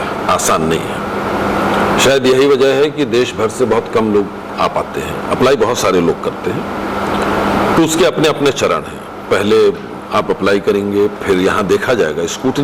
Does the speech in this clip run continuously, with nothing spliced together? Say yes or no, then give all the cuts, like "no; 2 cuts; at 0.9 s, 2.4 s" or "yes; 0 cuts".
yes; 0 cuts